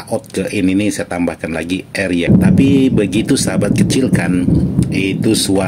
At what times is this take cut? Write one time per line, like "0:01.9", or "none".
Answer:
0:02.3